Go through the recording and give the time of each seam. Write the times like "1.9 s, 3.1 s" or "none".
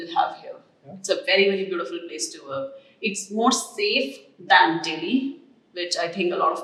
none